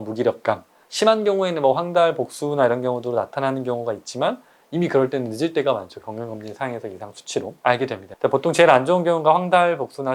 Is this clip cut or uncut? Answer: uncut